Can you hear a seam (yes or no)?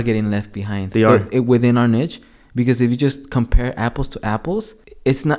no